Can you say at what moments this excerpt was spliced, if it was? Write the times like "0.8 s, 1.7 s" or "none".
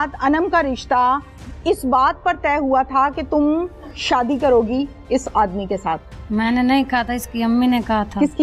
none